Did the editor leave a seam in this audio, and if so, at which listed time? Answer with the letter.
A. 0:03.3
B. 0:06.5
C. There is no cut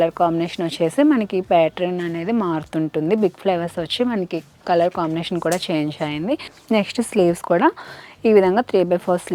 B